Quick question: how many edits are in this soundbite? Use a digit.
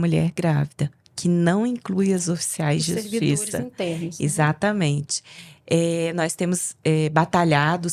0